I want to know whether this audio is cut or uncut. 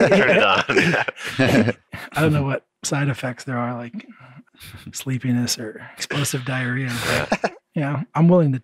cut